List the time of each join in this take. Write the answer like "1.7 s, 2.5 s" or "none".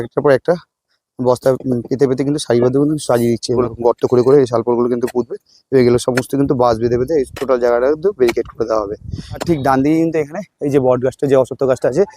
3.6 s, 9.4 s